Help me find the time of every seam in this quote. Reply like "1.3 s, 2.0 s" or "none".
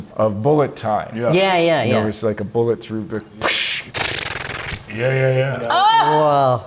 none

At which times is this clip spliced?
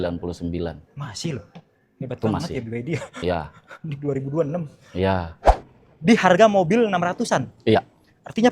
5.4 s

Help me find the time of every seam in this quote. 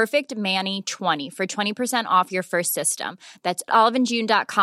1.2 s

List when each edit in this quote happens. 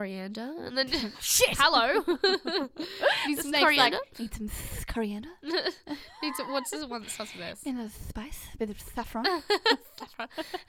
none

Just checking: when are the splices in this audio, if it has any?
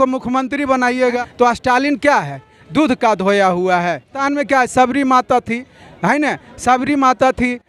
1.2 s, 4.2 s

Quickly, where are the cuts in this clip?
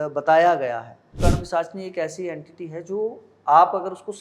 1.1 s

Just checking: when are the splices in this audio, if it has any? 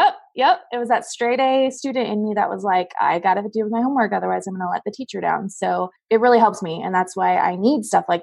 5.9 s

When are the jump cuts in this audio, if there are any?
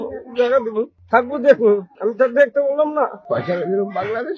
1.0 s, 2.0 s, 3.2 s

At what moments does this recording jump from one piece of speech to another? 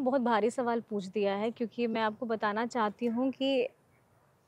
none

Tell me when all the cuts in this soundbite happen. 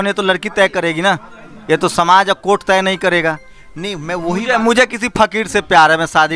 3.5 s

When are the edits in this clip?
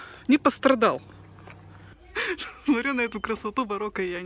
2.1 s

